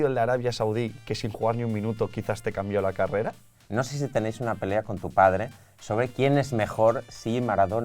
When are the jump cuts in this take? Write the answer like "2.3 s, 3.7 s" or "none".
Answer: 3.5 s